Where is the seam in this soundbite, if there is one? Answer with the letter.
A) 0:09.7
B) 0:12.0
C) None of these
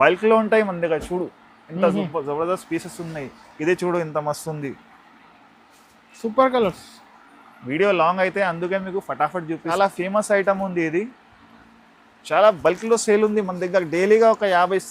A